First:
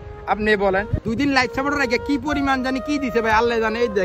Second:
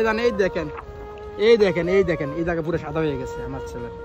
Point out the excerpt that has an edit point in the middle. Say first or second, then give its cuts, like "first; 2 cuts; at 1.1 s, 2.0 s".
first; 1 cut; at 0.9 s